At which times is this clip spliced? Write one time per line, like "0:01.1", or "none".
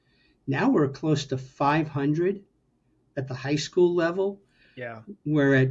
none